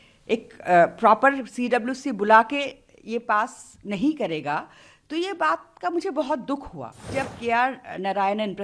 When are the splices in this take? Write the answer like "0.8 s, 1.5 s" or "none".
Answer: 7.1 s